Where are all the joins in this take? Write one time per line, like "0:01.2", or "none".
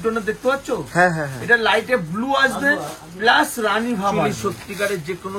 0:04.3